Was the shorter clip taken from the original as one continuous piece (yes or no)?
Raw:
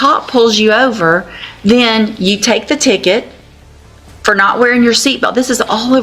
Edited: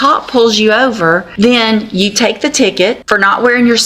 no